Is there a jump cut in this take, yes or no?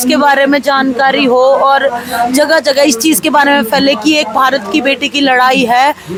no